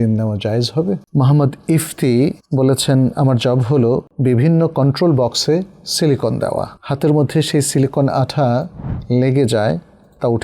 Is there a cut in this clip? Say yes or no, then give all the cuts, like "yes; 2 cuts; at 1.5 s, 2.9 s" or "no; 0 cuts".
yes; 4 cuts; at 1.0 s, 2.4 s, 4.1 s, 6.8 s